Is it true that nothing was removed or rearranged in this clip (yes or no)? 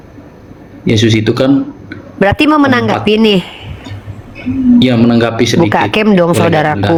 yes